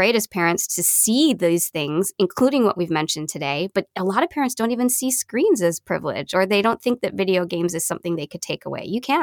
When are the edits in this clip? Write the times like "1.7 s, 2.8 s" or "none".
none